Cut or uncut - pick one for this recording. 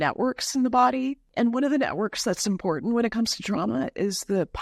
cut